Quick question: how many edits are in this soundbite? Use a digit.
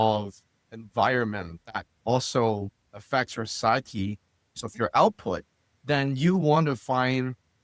1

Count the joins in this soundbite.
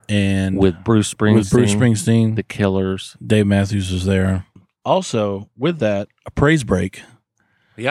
1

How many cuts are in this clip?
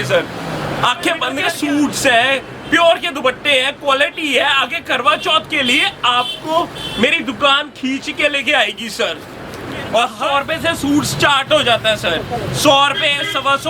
2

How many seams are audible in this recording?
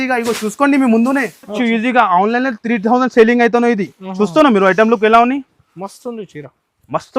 1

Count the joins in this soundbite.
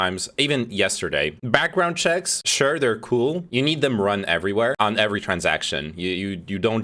1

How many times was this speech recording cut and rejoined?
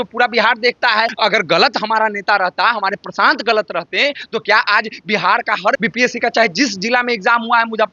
2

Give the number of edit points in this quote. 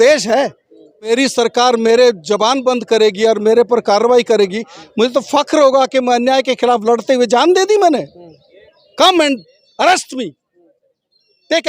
1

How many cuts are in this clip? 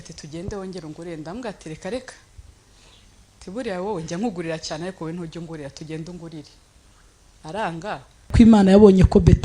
1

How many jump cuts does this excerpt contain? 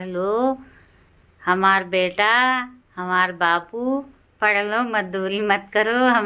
0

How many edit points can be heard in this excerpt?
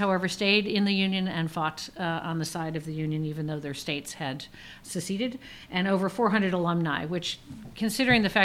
1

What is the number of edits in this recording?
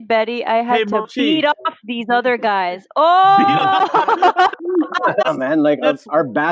1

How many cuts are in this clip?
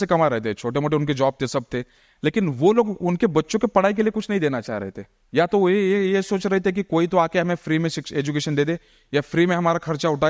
0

